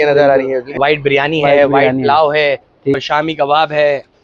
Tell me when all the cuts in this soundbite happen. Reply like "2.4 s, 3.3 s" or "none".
0.8 s, 3.0 s